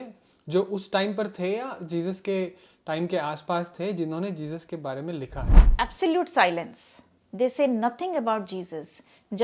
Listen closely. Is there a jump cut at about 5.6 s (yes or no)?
yes